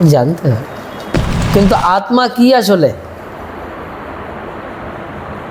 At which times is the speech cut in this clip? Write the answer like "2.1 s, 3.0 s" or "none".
1.4 s